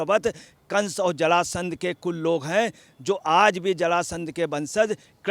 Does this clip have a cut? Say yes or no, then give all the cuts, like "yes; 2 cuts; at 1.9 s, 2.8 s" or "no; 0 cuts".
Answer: no; 0 cuts